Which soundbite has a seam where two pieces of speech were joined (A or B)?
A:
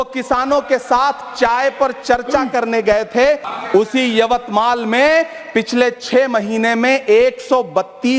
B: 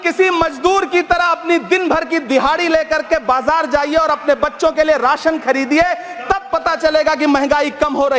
A